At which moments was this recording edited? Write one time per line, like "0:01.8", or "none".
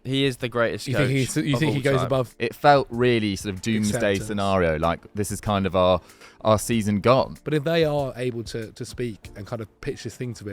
0:02.3
0:07.4